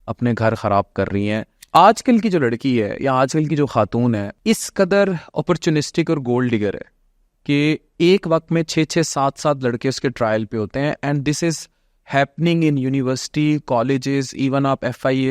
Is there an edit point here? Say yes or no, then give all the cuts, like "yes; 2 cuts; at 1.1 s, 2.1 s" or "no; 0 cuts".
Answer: yes; 2 cuts; at 1.6 s, 4.3 s